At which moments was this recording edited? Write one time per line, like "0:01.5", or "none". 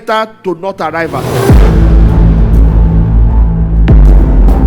0:01.2